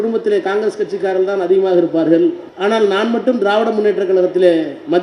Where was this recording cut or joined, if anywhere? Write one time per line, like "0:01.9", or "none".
0:02.5